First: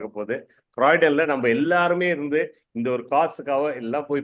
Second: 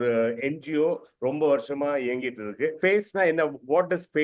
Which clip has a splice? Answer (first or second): second